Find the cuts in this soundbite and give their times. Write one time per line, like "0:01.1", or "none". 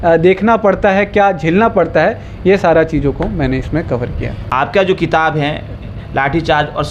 0:04.5